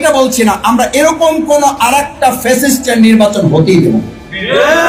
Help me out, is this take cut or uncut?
uncut